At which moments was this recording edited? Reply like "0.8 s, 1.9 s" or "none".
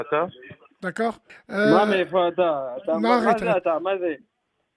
1.3 s

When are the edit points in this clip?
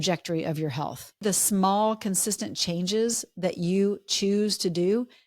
1.2 s

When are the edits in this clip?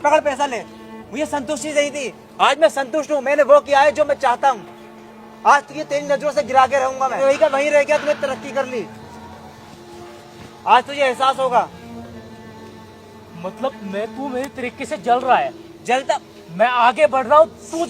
7.2 s

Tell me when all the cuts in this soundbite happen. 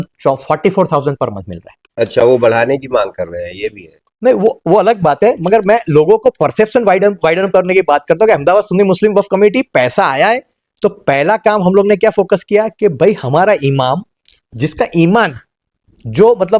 none

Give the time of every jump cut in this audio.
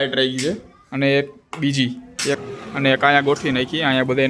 2.4 s

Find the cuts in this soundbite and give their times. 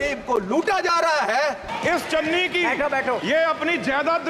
1.7 s

